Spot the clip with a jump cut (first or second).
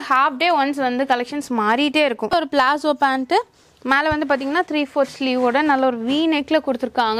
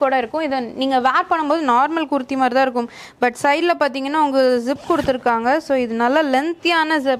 first